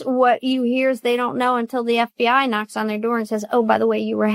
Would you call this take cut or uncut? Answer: uncut